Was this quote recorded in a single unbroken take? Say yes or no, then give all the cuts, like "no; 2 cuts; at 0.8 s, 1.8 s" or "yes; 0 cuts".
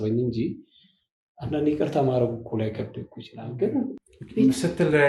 no; 1 cut; at 4.0 s